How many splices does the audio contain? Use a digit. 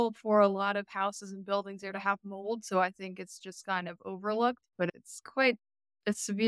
1